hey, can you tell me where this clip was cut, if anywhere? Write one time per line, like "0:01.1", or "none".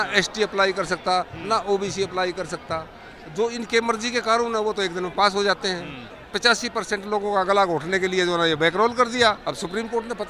0:06.2
0:09.4